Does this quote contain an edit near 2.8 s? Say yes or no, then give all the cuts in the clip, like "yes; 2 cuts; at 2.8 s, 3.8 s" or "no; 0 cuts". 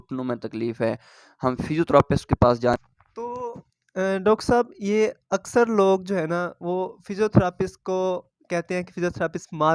yes; 1 cut; at 2.8 s